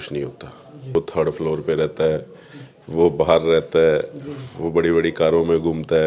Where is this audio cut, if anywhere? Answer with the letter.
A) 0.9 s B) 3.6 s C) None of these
A